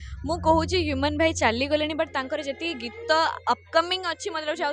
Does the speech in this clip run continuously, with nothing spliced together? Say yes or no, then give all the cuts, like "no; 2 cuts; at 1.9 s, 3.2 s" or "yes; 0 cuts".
yes; 0 cuts